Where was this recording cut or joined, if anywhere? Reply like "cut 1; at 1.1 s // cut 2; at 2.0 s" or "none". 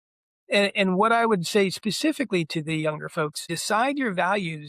cut 1; at 3.5 s